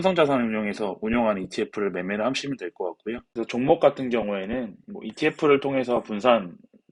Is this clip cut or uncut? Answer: cut